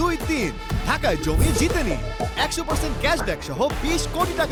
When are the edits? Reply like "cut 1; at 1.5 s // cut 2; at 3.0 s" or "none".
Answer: none